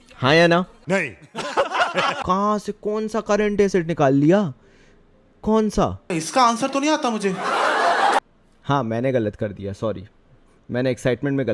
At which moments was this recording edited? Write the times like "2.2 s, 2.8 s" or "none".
2.2 s, 8.2 s